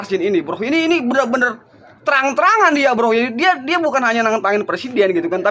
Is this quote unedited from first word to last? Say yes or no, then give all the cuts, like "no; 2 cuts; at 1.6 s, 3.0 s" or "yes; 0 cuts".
yes; 0 cuts